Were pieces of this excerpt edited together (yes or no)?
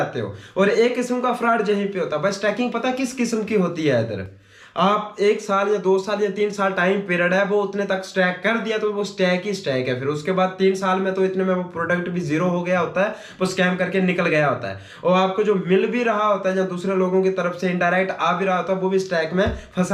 no